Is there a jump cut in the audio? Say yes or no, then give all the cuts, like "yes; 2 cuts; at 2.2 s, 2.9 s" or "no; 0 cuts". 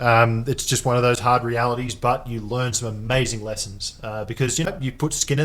no; 0 cuts